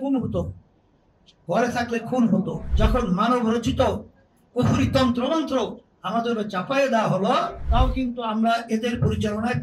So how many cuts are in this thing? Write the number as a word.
two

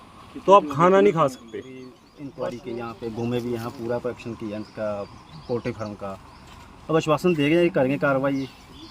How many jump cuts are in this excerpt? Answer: one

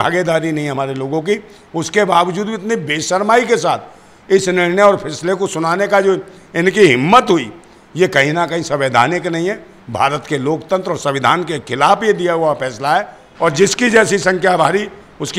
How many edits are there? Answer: one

